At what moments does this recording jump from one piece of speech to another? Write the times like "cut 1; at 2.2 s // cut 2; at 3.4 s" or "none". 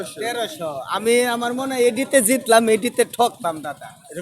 none